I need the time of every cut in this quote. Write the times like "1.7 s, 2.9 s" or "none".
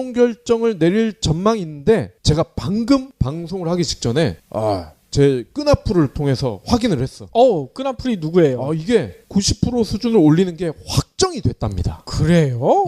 5.1 s